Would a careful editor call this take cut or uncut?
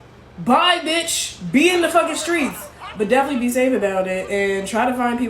cut